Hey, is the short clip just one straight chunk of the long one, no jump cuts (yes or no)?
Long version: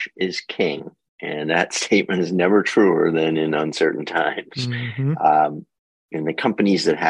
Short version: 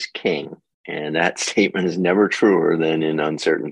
yes